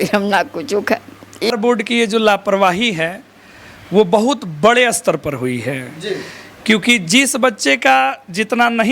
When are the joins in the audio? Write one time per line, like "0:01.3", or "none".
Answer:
0:01.5